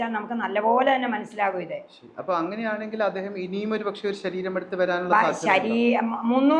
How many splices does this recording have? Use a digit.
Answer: 0